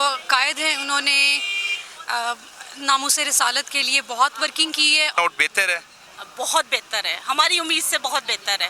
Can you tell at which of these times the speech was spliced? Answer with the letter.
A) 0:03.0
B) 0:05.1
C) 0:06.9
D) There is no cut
B